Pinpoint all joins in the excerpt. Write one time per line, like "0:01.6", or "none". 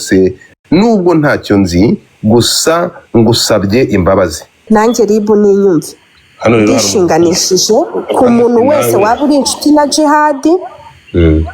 0:04.5